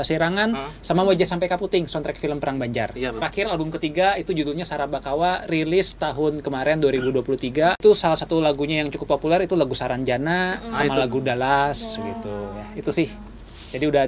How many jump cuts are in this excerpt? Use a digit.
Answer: 2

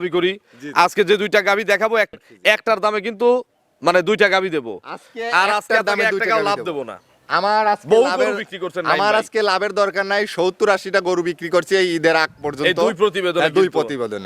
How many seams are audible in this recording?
1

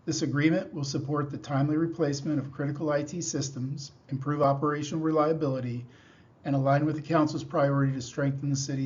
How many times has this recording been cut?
1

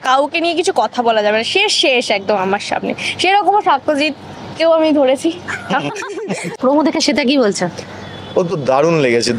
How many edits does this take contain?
1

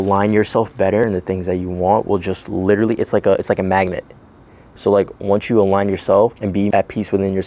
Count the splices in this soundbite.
2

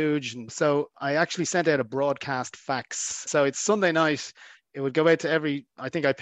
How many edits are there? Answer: 1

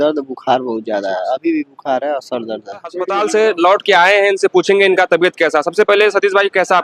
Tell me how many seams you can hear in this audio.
1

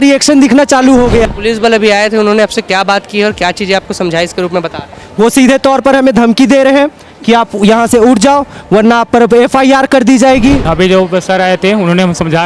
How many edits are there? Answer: 2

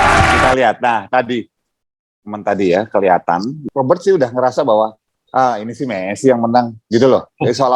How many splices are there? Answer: 1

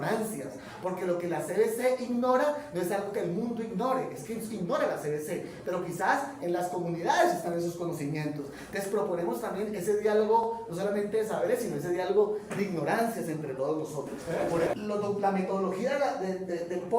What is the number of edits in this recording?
1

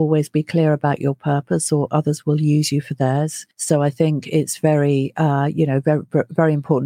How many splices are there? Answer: 1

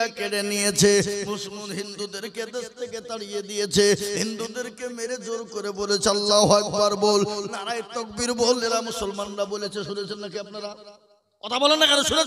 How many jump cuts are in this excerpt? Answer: 0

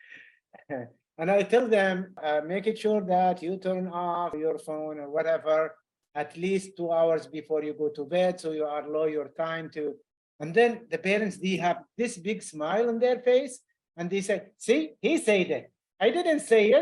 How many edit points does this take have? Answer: 2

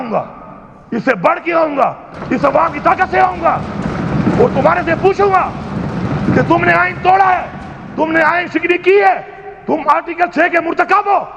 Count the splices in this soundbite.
0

